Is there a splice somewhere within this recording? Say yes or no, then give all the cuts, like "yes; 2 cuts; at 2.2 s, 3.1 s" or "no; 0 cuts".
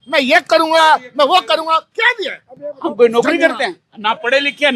no; 0 cuts